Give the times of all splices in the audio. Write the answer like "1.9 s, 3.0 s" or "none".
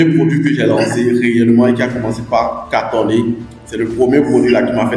none